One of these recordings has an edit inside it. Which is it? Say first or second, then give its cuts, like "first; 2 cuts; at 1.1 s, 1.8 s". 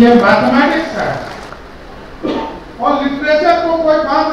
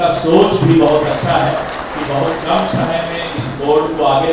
first; 1 cut; at 1.5 s